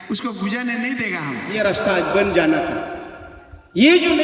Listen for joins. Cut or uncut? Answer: cut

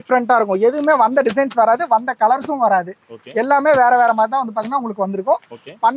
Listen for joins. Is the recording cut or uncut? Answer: uncut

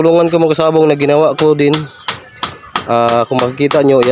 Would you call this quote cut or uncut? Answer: uncut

